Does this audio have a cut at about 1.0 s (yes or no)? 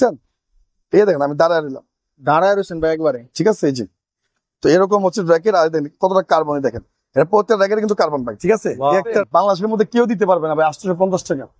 no